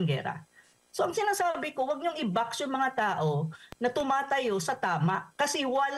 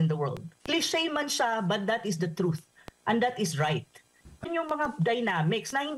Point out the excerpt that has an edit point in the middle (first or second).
second